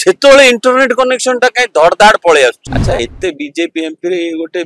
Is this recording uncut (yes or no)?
no